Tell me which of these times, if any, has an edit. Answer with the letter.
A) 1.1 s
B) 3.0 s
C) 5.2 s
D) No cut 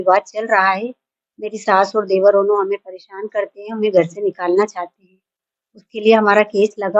D